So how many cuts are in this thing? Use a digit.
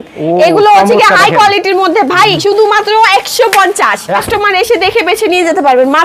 1